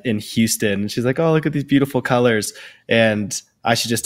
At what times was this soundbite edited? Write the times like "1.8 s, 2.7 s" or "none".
none